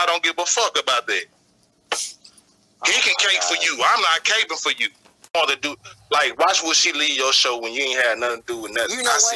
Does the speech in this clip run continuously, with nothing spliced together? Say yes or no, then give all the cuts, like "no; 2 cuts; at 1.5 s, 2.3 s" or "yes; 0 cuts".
no; 1 cut; at 5.2 s